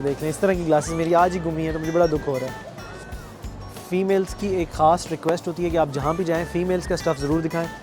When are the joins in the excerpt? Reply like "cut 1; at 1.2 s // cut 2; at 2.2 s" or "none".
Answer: cut 1; at 3.2 s